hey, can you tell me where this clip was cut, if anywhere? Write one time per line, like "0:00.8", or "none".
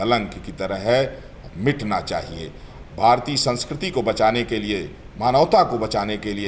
0:02.7